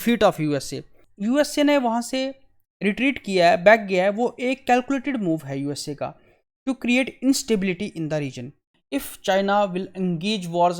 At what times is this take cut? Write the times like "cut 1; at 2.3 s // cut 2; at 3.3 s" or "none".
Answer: cut 1; at 1.0 s // cut 2; at 8.6 s